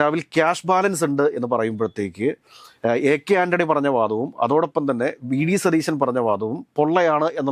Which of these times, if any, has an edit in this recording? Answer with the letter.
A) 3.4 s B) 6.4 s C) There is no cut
C